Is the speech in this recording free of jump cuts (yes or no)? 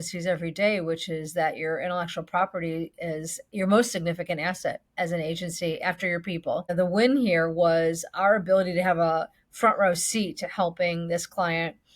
no